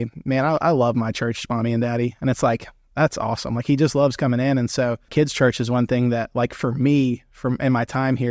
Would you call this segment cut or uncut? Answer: cut